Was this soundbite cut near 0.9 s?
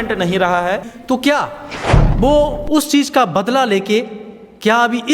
yes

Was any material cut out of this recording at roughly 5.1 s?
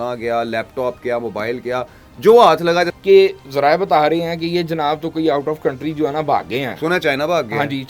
no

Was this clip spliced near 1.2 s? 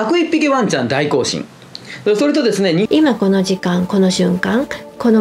no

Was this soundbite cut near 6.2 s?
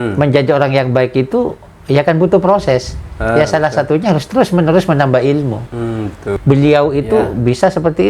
yes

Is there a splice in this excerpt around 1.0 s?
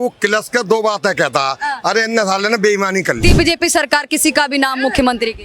no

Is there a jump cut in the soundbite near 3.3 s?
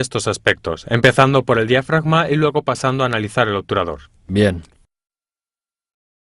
yes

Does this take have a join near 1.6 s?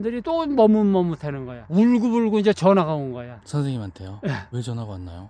yes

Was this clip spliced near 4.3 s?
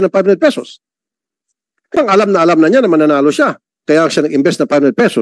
no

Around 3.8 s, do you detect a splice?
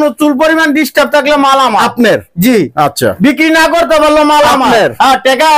no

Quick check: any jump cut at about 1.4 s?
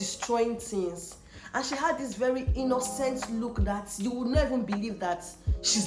no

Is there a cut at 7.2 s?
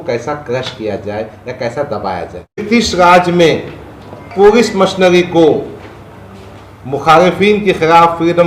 no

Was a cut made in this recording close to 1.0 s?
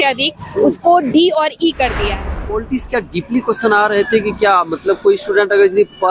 no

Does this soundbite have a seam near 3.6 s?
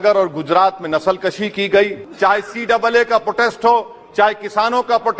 no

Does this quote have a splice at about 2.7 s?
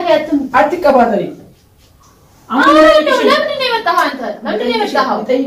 no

